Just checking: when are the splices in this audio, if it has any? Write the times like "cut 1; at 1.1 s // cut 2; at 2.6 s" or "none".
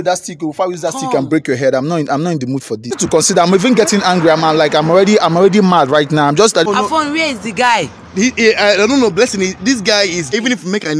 cut 1; at 3.0 s // cut 2; at 6.6 s // cut 3; at 10.3 s